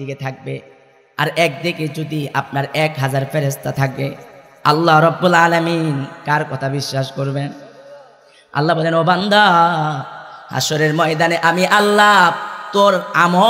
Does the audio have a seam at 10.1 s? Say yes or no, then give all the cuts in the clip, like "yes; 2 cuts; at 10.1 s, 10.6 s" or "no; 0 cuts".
no; 0 cuts